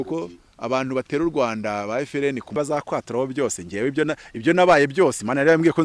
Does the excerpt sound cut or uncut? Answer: cut